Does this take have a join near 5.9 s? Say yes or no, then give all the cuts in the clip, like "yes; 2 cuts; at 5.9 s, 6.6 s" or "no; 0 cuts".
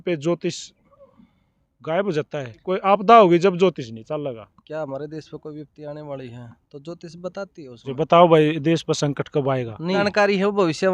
no; 4 cuts; at 2.7 s, 4.5 s, 7.9 s, 10.0 s